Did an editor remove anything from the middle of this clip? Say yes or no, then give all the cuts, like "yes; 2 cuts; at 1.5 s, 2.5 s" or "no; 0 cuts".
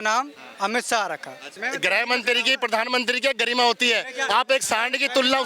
yes; 1 cut; at 1.5 s